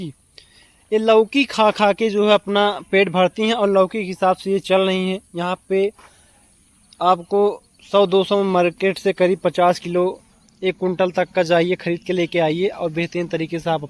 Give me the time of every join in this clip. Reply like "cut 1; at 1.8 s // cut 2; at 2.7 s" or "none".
none